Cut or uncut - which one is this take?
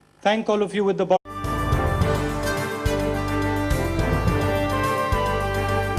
uncut